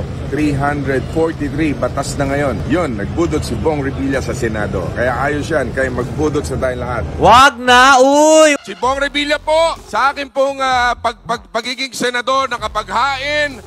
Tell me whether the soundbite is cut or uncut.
cut